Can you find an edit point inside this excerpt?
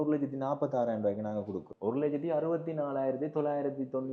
yes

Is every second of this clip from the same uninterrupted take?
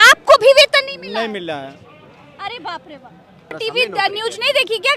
no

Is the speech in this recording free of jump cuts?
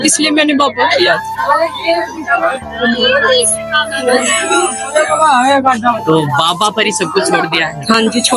yes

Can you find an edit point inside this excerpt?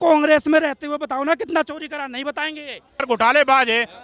yes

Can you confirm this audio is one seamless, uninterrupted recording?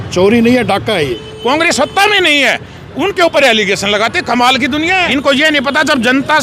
no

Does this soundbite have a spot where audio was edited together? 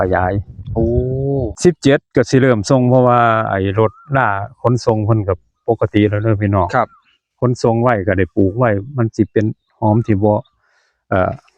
yes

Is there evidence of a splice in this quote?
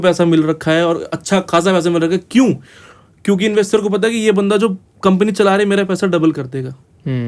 no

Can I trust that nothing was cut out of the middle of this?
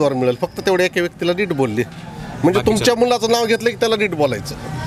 yes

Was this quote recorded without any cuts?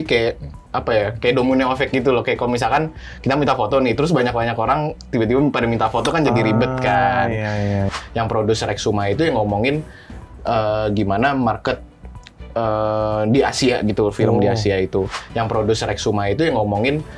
no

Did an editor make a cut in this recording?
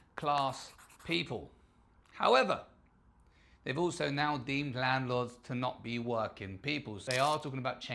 yes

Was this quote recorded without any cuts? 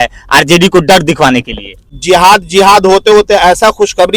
no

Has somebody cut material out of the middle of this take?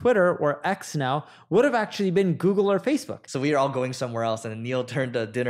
yes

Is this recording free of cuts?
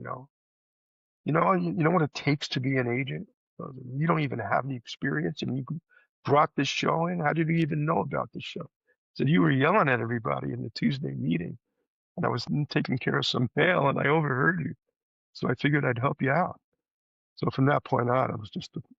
yes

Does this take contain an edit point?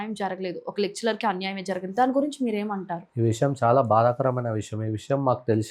no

